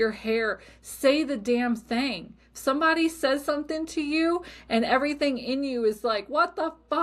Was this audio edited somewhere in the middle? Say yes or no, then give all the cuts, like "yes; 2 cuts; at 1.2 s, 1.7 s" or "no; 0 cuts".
no; 0 cuts